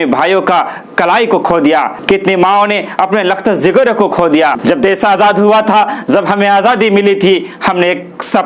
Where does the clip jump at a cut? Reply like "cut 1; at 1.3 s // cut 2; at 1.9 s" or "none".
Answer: cut 1; at 2.0 s // cut 2; at 4.6 s